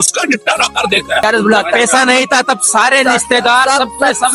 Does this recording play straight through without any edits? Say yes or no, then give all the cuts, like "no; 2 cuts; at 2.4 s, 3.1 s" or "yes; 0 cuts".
no; 1 cut; at 1.2 s